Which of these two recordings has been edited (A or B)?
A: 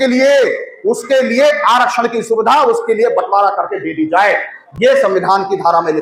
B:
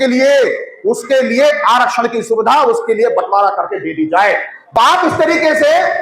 B